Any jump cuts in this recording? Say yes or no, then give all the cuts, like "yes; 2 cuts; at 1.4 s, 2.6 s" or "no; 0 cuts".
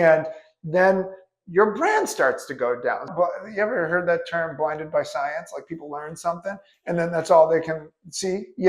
yes; 1 cut; at 3.1 s